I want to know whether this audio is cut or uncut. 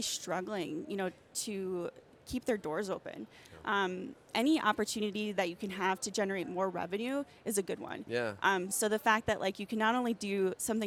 uncut